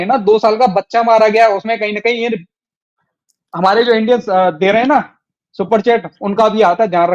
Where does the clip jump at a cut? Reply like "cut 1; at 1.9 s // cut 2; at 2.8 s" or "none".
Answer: none